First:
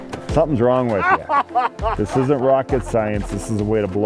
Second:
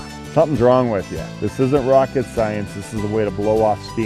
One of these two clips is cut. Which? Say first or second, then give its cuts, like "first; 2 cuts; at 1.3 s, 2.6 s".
second; 1 cut; at 1.1 s